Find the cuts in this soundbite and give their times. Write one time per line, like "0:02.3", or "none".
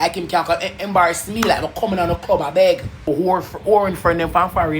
0:03.0